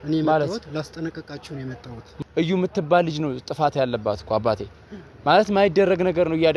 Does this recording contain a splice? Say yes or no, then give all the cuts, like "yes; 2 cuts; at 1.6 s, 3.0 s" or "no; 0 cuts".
yes; 1 cut; at 2.0 s